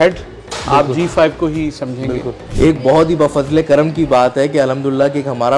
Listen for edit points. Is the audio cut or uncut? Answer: cut